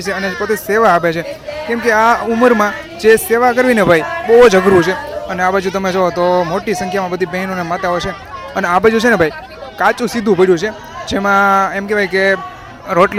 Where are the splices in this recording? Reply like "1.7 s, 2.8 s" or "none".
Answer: none